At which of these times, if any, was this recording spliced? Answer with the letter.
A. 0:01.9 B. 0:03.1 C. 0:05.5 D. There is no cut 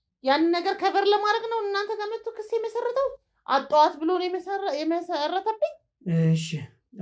D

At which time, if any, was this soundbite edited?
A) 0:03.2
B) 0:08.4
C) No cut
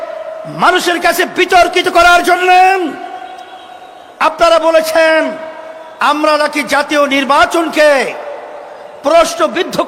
C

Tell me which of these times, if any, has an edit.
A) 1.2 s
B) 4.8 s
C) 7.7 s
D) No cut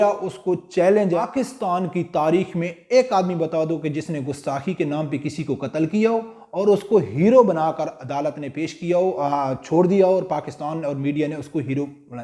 A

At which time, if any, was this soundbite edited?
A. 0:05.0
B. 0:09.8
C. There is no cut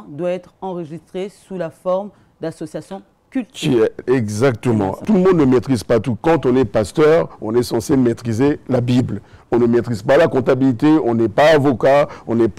A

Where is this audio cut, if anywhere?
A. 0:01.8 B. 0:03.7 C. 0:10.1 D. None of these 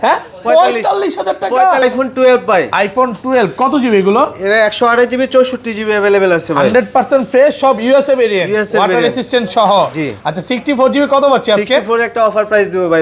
A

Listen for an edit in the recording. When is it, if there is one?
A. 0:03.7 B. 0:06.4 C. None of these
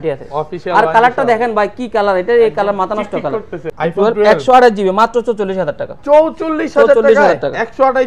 A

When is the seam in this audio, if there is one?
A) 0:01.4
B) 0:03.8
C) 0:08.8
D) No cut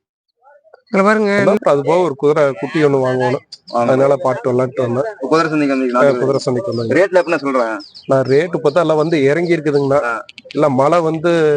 A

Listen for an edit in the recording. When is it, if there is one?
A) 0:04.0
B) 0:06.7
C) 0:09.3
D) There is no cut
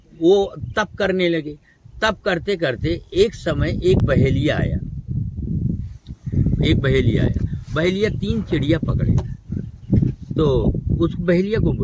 D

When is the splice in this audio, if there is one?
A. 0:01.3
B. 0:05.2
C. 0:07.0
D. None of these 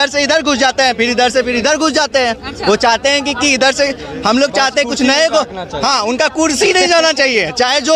D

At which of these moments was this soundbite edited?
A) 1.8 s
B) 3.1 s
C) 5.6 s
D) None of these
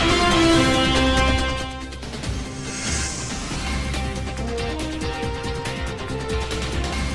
B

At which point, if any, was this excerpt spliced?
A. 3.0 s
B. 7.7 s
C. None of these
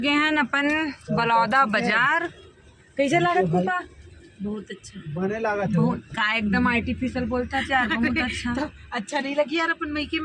C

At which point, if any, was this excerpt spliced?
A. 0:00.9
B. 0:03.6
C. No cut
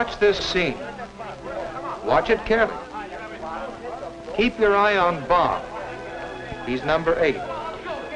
B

